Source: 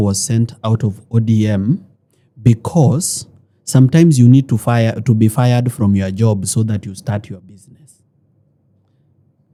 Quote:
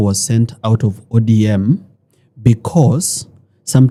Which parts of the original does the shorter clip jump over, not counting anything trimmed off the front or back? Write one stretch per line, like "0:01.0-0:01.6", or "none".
none